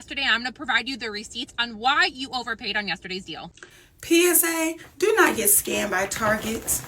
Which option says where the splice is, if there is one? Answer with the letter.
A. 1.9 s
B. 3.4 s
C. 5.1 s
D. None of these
B